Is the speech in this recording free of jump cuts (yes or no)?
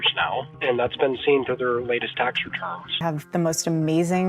no